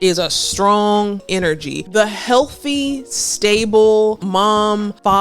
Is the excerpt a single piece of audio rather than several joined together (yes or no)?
no